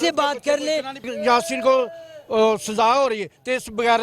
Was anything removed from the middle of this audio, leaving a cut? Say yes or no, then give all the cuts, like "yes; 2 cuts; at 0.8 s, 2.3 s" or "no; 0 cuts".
yes; 1 cut; at 1.1 s